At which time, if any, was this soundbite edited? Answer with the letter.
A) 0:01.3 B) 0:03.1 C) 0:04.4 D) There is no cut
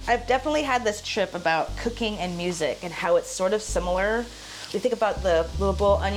D